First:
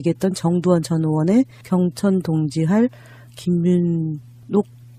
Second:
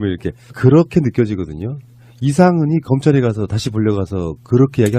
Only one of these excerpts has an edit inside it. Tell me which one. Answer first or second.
second